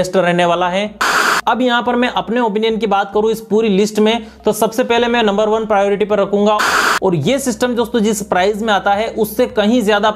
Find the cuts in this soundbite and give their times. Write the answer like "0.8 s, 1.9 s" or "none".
1.2 s, 6.7 s